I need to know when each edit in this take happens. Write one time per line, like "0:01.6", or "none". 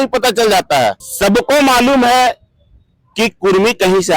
0:01.1